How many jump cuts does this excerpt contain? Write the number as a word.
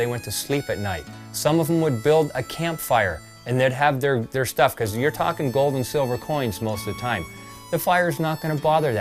zero